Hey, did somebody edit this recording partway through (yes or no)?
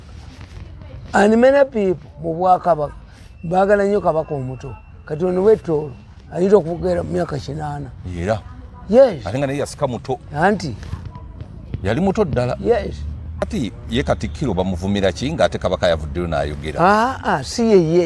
yes